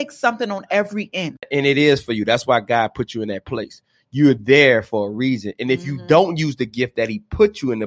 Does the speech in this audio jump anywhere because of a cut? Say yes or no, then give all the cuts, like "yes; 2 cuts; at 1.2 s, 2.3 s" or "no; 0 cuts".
yes; 1 cut; at 1.5 s